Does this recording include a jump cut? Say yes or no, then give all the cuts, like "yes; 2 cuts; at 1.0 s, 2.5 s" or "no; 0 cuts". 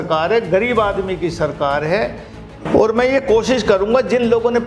yes; 1 cut; at 2.7 s